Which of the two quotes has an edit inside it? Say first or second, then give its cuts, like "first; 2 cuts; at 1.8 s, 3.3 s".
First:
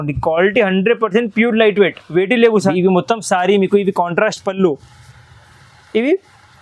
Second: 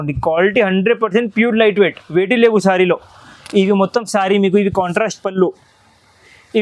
first; 1 cut; at 2.7 s